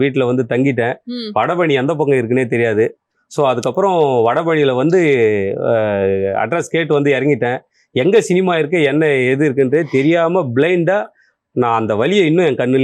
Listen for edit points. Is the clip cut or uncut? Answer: uncut